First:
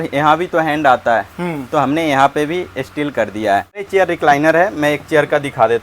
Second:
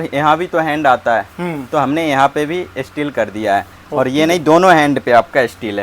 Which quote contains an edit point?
first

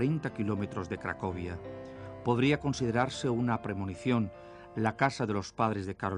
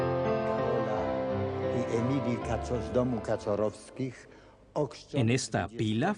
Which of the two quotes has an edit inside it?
second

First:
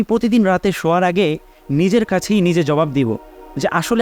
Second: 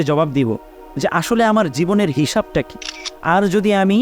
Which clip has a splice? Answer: second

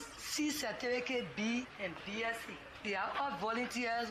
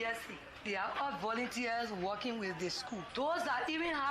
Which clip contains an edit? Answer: second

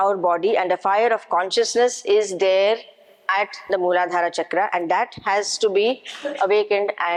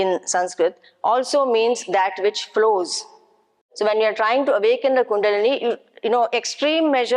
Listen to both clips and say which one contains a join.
second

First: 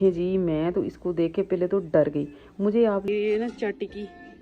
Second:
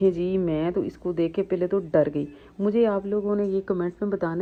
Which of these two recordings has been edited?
first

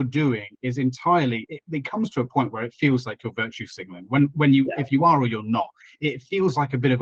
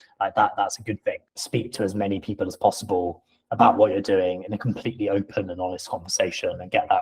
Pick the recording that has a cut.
second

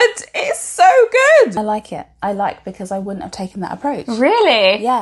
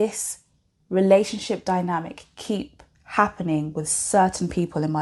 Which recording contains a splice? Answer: first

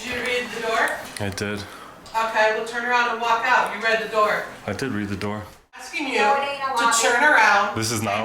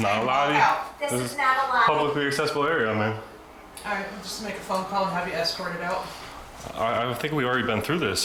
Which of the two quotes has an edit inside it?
first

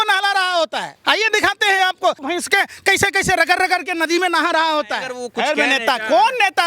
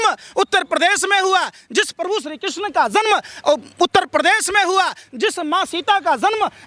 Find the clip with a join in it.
first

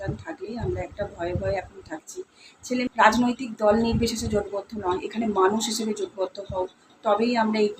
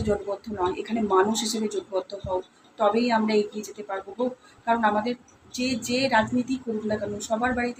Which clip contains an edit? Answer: first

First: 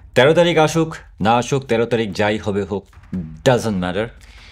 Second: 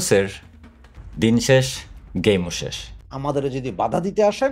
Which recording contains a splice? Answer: second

